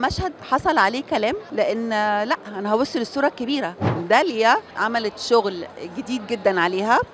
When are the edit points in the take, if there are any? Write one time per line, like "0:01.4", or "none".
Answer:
0:01.4
0:04.0
0:04.7